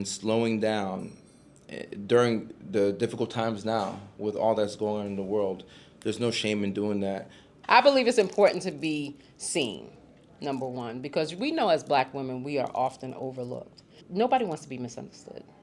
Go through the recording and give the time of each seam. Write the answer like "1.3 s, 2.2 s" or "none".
7.6 s, 14.1 s